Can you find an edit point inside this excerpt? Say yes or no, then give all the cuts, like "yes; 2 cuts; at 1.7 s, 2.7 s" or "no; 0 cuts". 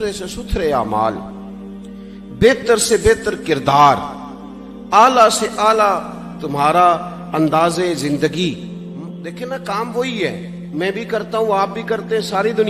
yes; 1 cut; at 9.2 s